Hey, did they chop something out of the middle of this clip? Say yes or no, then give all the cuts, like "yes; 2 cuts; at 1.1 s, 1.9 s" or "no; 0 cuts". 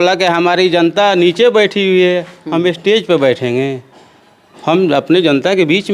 no; 0 cuts